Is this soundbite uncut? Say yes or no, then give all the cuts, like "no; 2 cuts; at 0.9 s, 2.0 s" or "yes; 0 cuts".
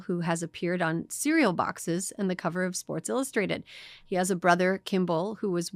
yes; 0 cuts